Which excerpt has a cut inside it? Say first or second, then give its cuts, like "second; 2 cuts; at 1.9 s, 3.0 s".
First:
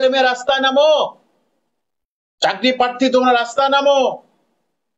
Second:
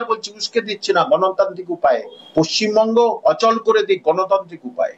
second; 1 cut; at 2.2 s